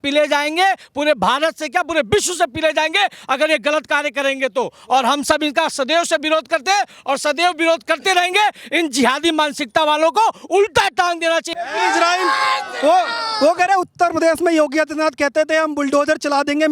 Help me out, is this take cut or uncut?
uncut